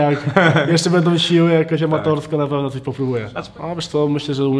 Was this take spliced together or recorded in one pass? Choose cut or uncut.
cut